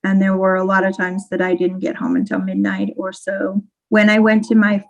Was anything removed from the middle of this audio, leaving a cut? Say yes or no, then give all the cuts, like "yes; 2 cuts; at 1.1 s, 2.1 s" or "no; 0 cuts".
yes; 1 cut; at 3.8 s